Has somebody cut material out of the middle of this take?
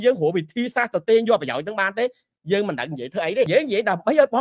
yes; 1 cut; at 3.5 s

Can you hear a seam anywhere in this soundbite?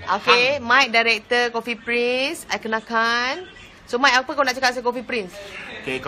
yes; 1 cut; at 4.6 s

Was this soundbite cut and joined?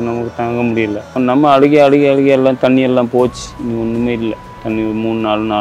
yes; 2 cuts; at 1.1 s, 4.5 s

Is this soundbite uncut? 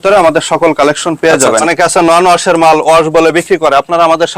no; 1 cut; at 1.7 s

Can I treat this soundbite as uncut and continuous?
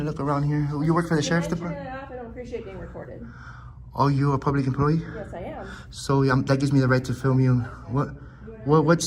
yes; 0 cuts

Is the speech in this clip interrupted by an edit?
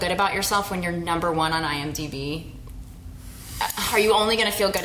no; 0 cuts

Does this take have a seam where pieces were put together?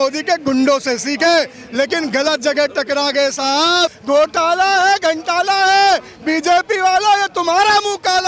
yes; 1 cut; at 4.0 s

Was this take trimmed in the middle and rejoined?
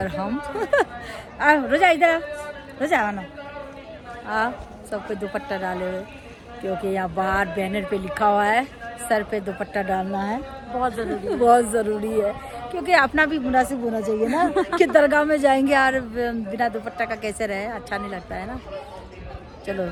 no; 0 cuts

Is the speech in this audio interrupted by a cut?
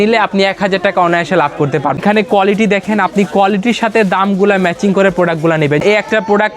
yes; 2 cuts; at 2.0 s, 5.8 s

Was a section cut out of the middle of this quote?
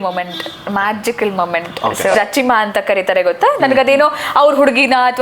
yes; 1 cut; at 2.1 s

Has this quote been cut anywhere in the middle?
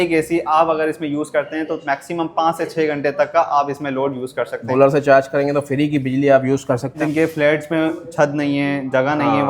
yes; 2 cuts; at 4.6 s, 7.0 s

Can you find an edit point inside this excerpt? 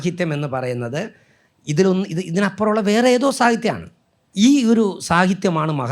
yes; 1 cut; at 4.2 s

